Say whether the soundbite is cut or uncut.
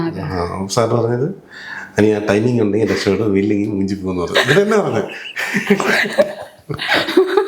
uncut